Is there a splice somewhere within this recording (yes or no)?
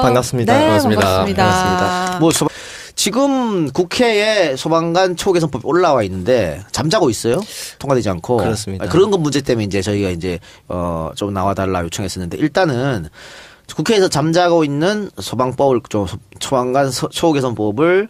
no